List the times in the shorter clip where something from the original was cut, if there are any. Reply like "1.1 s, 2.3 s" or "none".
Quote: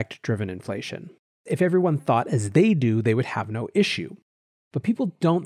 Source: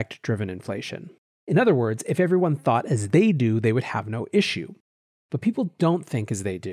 1.4 s